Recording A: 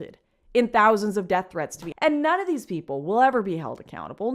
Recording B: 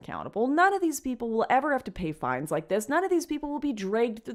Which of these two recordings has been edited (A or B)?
A